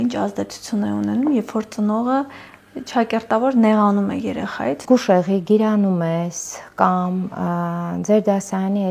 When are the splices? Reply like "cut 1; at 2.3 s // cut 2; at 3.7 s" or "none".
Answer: cut 1; at 4.8 s